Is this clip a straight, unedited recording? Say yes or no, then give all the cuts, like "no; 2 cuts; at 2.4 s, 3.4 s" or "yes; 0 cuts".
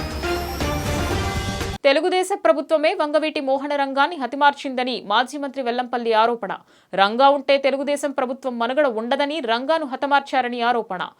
no; 1 cut; at 1.7 s